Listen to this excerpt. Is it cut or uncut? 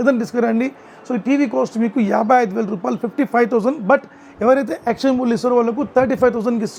uncut